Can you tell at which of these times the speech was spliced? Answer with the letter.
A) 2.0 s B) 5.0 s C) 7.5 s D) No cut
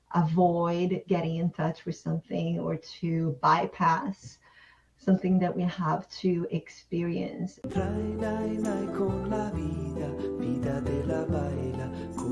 C